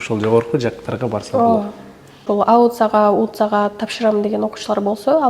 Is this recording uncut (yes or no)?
no